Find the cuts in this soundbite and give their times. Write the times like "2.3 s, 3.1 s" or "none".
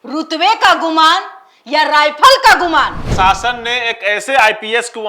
3.1 s